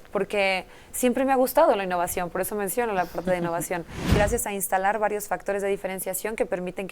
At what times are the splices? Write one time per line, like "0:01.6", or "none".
0:04.2